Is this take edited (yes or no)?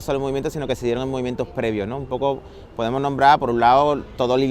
no